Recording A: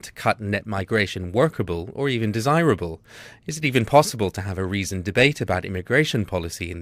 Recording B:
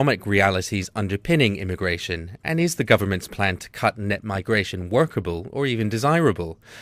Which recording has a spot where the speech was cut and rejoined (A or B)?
A